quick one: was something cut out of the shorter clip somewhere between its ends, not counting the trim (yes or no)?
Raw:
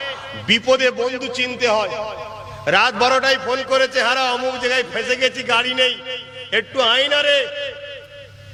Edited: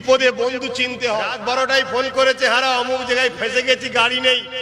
yes